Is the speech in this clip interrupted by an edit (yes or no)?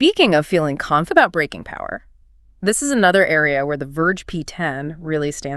yes